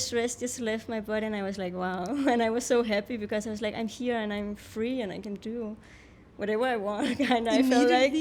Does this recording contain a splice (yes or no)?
no